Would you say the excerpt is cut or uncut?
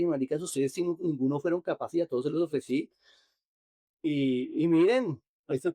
uncut